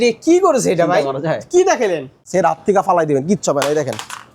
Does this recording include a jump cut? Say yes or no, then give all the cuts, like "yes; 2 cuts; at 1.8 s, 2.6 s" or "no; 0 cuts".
yes; 1 cut; at 2.2 s